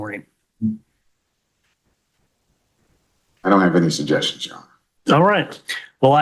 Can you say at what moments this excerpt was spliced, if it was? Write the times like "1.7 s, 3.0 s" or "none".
2.3 s